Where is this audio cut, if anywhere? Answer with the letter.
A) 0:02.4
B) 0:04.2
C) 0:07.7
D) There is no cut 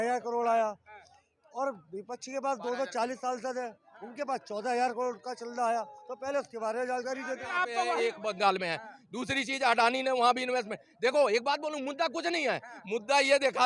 C